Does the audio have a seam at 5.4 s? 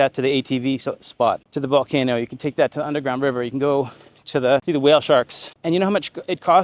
yes; 3 cuts; at 1.5 s, 4.6 s, 5.4 s

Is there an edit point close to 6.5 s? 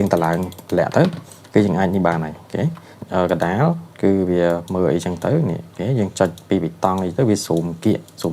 no; 1 cut; at 3.0 s

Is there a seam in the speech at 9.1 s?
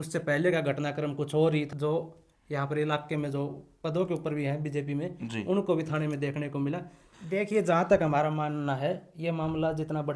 no; 2 cuts; at 1.7 s, 7.1 s

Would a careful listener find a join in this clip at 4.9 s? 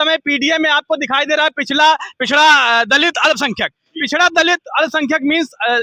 no; 0 cuts

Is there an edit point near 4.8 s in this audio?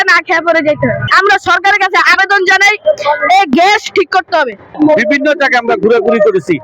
yes; 1 cut; at 4.8 s

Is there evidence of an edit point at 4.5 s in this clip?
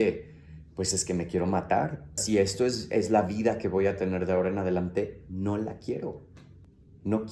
no; 1 cut; at 2.2 s

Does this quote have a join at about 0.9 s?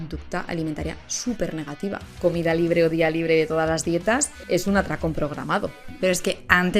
no; 3 cuts; at 2.2 s, 4.3 s, 5.9 s

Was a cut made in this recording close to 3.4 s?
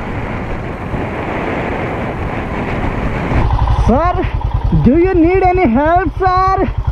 yes; 1 cut; at 3.4 s

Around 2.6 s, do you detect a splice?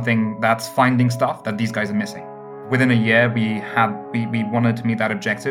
yes; 1 cut; at 2.6 s

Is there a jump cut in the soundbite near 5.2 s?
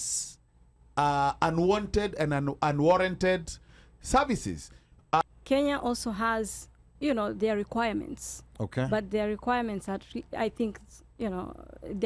yes; 1 cut; at 5.2 s

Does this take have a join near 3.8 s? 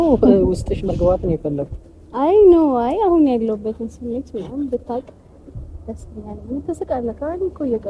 no; 0 cuts

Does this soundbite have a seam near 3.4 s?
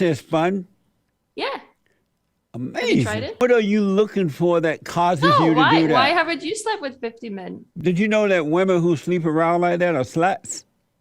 yes; 2 cuts; at 3.4 s, 7.7 s

